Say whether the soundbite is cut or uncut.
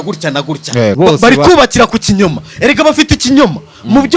cut